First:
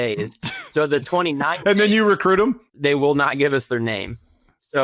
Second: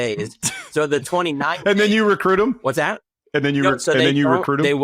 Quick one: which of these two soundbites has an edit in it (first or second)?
first